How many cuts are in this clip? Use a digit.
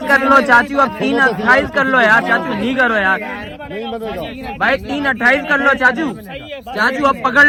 0